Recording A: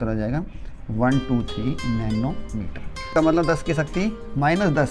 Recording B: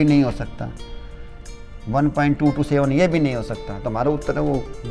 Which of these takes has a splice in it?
A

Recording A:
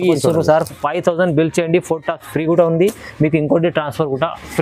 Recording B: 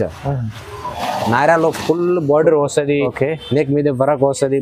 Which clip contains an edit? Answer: B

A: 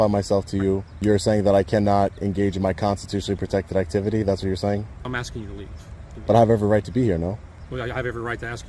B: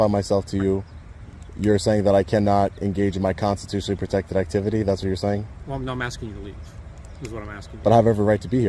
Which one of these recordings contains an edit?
A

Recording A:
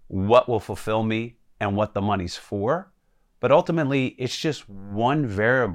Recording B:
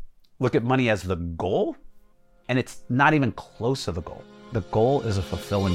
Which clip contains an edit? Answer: B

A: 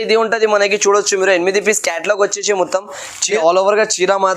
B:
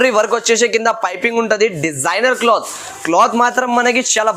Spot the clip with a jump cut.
A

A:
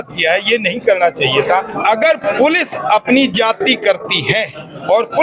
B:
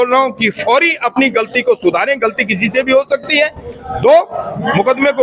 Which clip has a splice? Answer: A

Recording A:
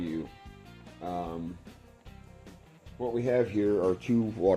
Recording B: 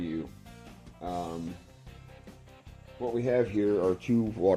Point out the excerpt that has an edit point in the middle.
B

